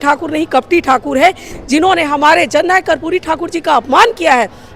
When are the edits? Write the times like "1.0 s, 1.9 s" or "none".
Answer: 1.5 s